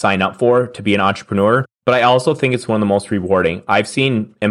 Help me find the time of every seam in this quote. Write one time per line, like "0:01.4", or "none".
0:01.7

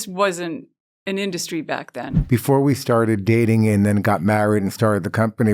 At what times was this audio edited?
0:02.1

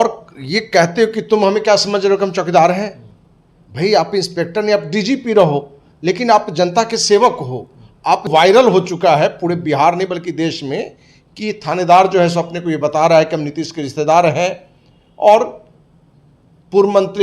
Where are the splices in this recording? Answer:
0:08.3

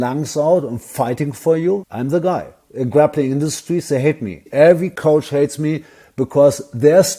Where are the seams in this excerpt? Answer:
none

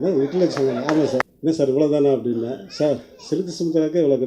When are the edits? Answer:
0:01.3

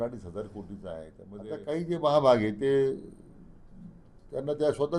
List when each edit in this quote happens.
0:01.2

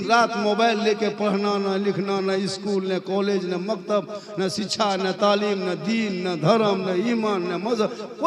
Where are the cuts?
none

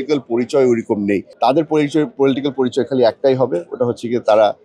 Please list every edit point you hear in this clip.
0:01.3

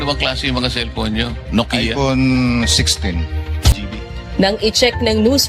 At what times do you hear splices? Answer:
0:03.7

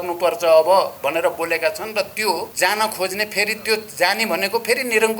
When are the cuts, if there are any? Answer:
0:02.5

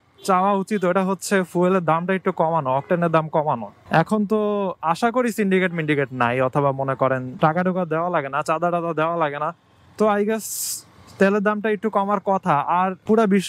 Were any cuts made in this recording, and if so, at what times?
none

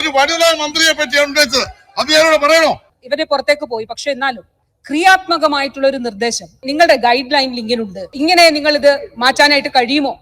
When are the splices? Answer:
0:03.0
0:06.7
0:08.1

